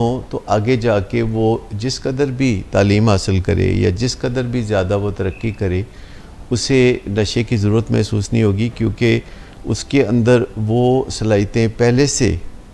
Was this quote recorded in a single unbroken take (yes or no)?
yes